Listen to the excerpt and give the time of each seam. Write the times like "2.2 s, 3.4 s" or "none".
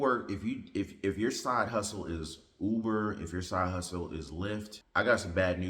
4.8 s